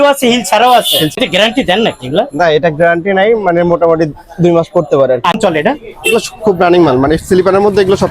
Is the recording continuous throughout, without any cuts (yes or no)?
no